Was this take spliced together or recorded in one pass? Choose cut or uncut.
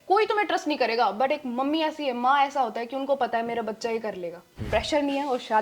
cut